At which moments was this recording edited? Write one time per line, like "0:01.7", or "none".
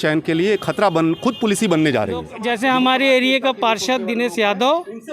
0:02.3